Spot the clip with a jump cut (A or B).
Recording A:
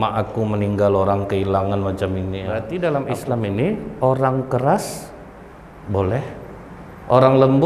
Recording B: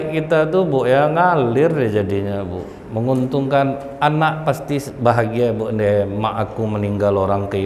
A